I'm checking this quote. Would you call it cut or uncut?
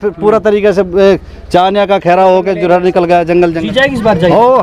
cut